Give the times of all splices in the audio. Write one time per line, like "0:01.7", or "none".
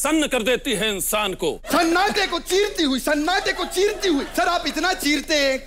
0:01.7
0:04.3

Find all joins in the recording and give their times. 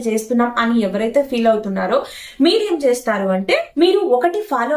0:03.7

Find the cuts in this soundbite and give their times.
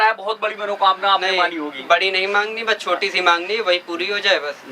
none

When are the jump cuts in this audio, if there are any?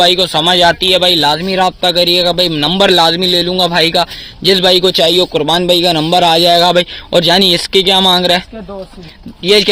none

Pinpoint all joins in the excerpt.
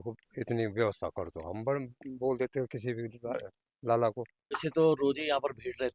0:04.6

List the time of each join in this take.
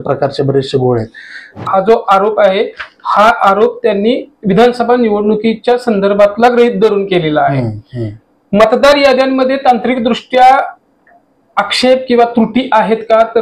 0:01.5

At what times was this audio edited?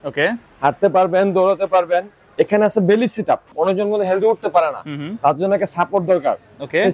0:02.3
0:03.5

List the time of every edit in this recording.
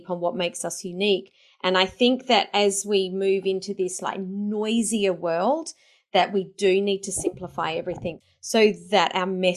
0:08.2

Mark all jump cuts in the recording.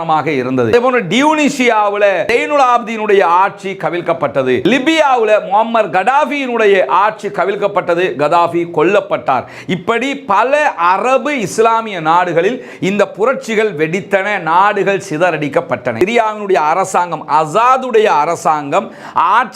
0:15.9

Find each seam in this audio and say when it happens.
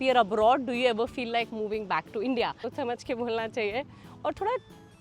0:02.7

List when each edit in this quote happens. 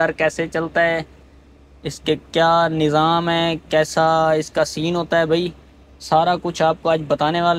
none

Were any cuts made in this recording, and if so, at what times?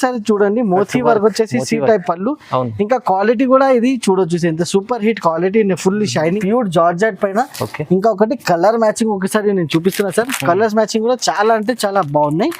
0:06.4

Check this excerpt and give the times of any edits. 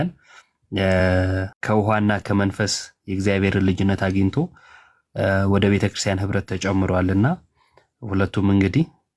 0:01.5

